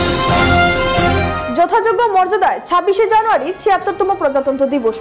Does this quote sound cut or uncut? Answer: cut